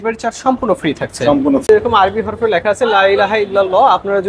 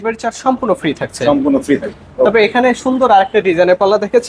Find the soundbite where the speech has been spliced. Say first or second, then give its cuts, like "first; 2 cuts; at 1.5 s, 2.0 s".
first; 1 cut; at 1.7 s